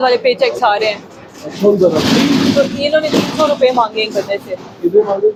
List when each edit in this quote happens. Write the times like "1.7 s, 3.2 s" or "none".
none

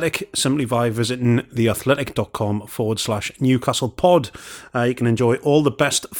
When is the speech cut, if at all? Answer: 5.1 s

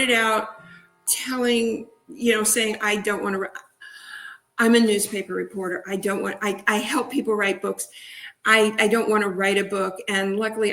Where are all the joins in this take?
1.0 s

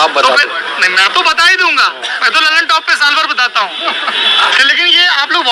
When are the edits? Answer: none

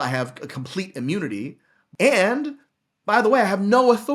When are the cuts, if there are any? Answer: 1.8 s

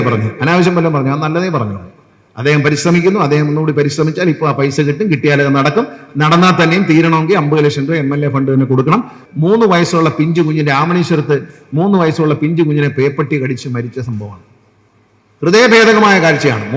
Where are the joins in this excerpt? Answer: 9.2 s

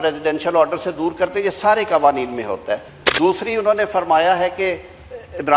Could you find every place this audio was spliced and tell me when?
2.9 s

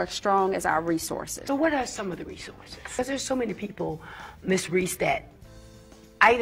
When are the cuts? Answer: 1.3 s, 2.9 s

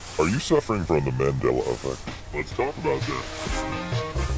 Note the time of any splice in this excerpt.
1.7 s

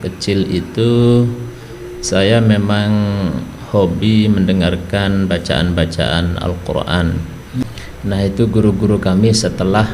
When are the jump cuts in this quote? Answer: 7.6 s

